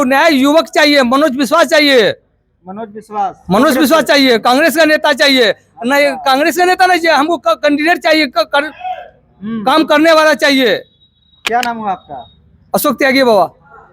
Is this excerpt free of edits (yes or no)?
yes